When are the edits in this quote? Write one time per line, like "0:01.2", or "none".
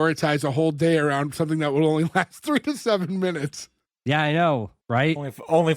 0:04.8

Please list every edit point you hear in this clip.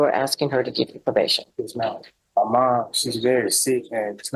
0:02.1

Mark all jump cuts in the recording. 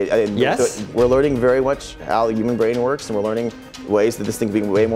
0:00.9

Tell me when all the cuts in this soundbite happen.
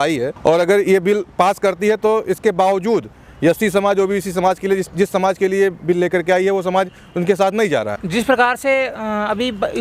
none

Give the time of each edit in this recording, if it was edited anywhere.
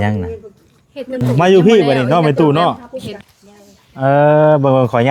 0:01.3

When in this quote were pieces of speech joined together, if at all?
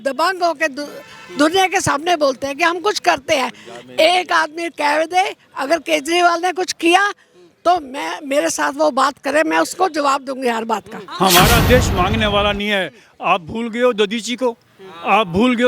0:11.0

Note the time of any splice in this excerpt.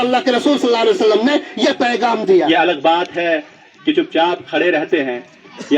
0:02.5

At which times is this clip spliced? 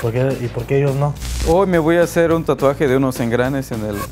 0:01.3

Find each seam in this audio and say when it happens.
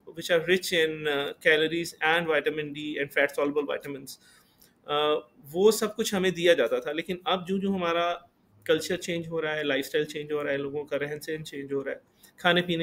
none

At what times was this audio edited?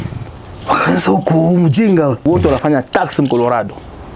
0:02.2

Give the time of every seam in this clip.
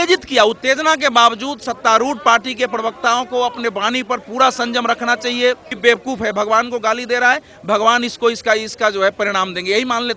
0:05.7

